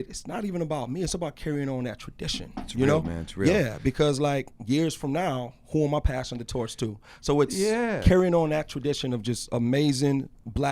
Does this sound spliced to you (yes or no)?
no